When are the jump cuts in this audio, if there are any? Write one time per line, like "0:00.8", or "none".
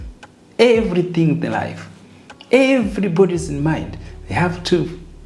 none